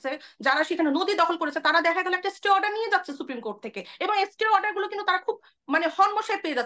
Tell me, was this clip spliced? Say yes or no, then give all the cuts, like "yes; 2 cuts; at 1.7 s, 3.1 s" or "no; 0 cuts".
no; 0 cuts